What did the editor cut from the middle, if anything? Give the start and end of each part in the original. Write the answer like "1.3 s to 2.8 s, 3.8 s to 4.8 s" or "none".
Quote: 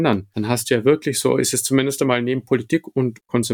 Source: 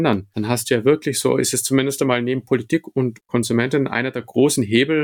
none